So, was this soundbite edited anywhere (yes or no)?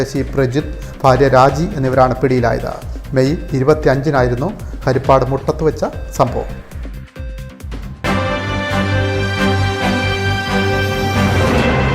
yes